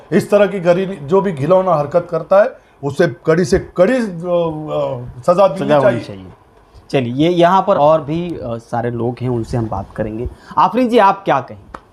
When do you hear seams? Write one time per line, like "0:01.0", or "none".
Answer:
none

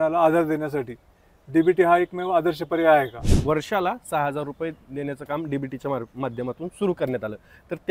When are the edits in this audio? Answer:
0:03.3

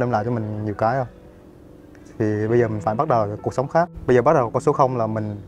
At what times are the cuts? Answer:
0:04.0

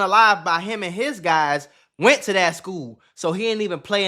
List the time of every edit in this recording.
none

